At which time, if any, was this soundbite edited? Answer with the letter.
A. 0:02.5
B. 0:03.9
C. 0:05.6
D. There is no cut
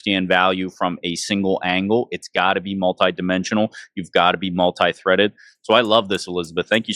D